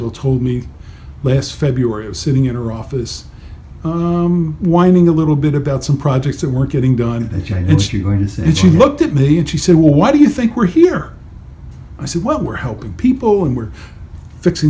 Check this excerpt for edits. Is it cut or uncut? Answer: uncut